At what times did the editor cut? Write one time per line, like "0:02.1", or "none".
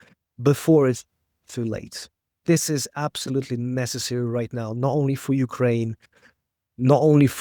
0:02.4